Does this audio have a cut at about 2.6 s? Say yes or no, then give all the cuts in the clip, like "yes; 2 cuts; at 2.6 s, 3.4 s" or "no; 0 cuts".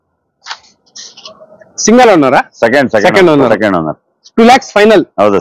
no; 0 cuts